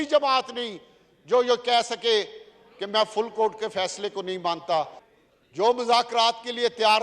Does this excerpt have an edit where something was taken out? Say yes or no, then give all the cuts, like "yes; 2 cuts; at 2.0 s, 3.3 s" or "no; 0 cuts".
yes; 1 cut; at 5.0 s